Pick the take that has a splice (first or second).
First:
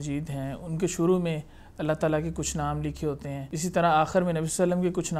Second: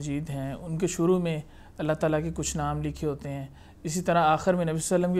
first